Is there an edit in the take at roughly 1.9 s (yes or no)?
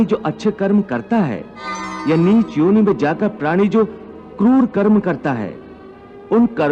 yes